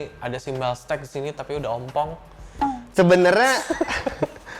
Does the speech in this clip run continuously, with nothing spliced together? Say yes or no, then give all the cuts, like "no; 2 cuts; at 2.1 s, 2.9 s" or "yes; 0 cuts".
yes; 0 cuts